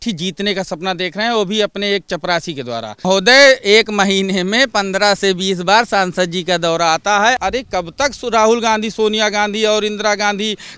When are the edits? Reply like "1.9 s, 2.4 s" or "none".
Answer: 3.1 s, 7.4 s